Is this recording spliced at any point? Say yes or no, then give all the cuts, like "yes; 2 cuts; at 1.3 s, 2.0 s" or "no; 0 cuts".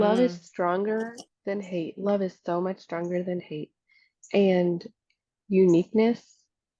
no; 0 cuts